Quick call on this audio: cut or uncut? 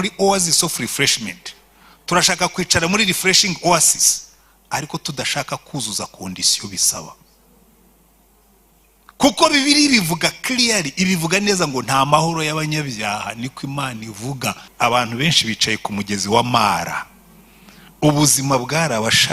cut